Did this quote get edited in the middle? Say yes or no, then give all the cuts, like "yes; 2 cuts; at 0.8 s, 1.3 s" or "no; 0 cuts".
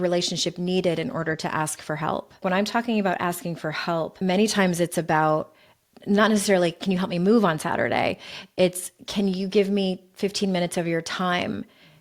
yes; 2 cuts; at 2.4 s, 4.1 s